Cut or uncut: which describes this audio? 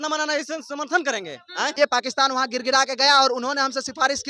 cut